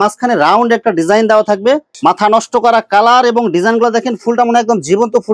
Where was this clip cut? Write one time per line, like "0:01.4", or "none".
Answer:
0:01.9